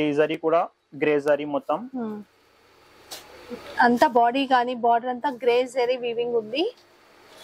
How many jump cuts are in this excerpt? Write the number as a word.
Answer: zero